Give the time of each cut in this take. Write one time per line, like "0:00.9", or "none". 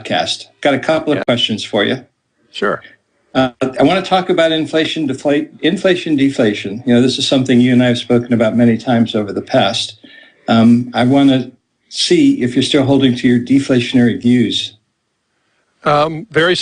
0:11.1